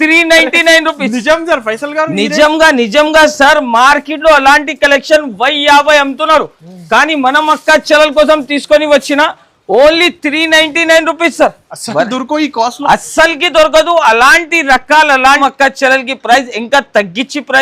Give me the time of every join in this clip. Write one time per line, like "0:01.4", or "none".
0:15.4